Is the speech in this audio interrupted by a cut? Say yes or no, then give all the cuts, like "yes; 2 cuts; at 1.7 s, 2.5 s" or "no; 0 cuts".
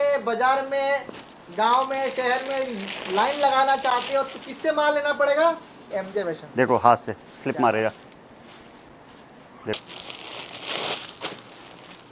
yes; 1 cut; at 9.8 s